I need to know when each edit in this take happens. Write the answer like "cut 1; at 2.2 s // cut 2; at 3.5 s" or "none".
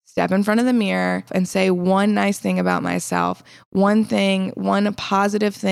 cut 1; at 1.3 s